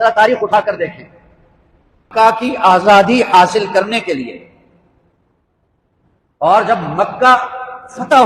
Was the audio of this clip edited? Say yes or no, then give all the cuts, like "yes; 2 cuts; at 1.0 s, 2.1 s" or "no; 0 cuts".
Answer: yes; 1 cut; at 2.1 s